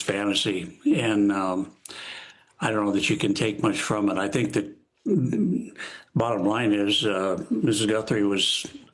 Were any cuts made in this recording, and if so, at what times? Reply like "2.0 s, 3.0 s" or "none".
none